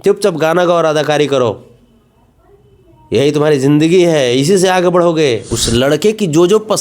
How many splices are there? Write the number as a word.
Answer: one